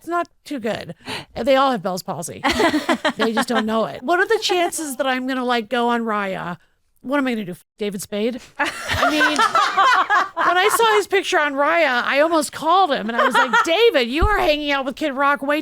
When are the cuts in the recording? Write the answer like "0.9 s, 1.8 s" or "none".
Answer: 4.0 s